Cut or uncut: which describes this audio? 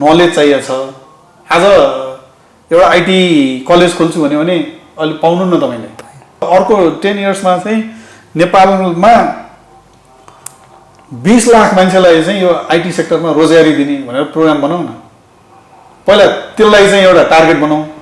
cut